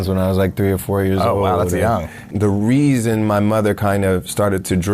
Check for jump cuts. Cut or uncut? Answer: cut